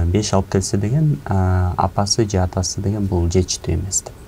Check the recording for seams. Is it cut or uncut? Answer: uncut